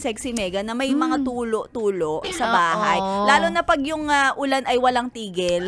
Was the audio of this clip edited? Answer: no; 0 cuts

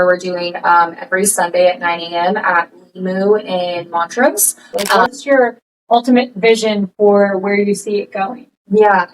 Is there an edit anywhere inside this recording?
yes; 1 cut; at 5.0 s

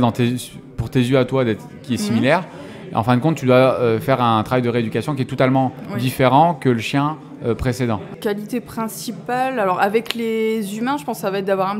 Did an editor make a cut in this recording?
yes; 1 cut; at 8.1 s

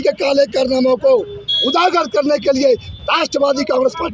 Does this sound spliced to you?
no; 0 cuts

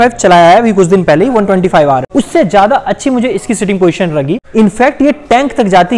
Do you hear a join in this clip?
yes; 2 cuts; at 2.1 s, 4.4 s

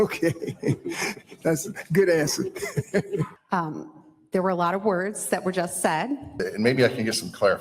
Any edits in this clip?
yes; 2 cuts; at 3.4 s, 6.4 s

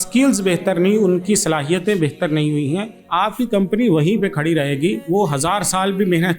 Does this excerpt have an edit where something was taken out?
yes; 2 cuts; at 3.0 s, 5.0 s

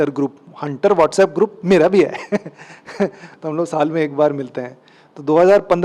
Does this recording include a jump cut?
no; 0 cuts

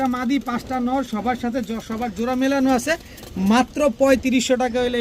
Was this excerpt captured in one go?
yes; 0 cuts

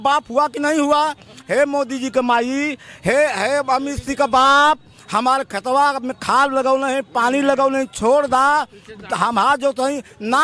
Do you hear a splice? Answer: yes; 1 cut; at 1.3 s

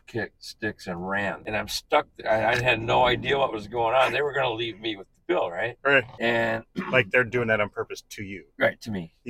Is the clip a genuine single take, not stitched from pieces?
no; 2 cuts; at 1.4 s, 6.1 s

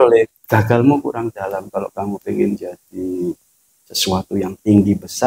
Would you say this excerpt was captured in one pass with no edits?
yes; 0 cuts

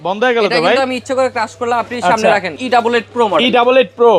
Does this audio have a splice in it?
yes; 1 cut; at 2.5 s

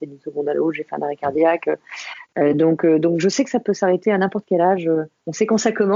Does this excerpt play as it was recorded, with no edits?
yes; 0 cuts

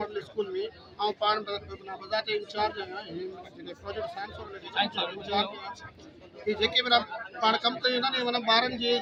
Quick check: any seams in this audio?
no; 0 cuts

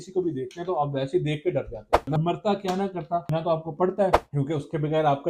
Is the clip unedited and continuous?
no; 1 cut; at 2.1 s

